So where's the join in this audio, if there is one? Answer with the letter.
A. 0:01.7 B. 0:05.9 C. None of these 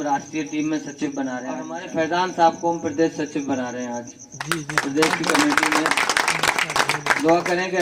A